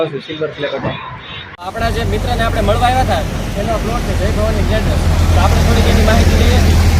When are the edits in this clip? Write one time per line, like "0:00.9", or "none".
0:01.6